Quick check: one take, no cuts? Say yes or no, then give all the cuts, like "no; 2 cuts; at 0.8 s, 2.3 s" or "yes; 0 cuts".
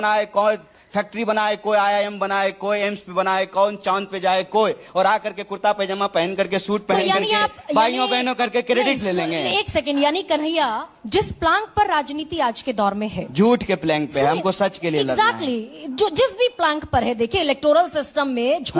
yes; 0 cuts